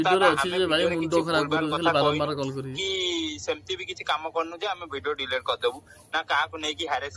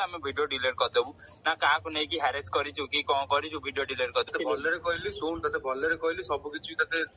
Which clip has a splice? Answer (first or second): second